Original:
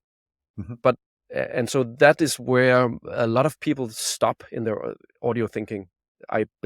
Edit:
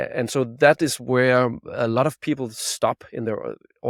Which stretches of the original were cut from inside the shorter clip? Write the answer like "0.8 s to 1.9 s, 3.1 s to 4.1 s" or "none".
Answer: none